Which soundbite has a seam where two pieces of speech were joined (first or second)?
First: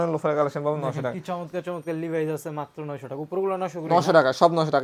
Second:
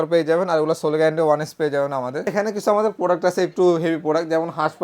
second